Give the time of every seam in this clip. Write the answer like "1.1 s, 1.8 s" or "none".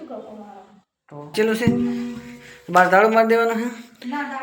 1.3 s